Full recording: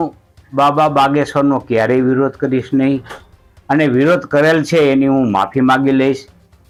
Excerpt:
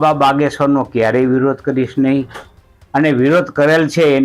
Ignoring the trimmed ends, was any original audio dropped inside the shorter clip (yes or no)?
no